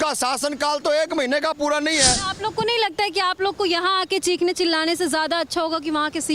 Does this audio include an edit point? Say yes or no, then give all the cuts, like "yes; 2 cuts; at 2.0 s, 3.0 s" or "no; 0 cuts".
yes; 1 cut; at 2.3 s